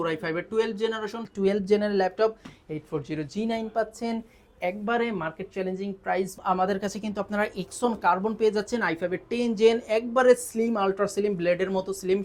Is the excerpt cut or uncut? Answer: cut